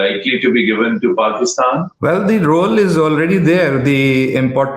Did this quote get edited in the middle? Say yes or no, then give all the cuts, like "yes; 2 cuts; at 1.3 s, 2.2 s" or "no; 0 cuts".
yes; 1 cut; at 1.9 s